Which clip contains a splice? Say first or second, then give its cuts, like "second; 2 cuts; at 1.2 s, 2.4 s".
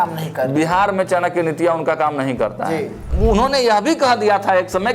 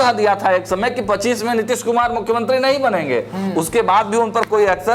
first; 1 cut; at 3.0 s